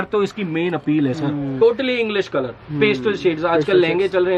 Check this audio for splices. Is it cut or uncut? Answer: cut